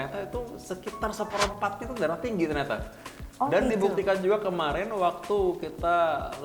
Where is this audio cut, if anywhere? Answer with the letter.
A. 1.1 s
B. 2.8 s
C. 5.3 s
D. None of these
D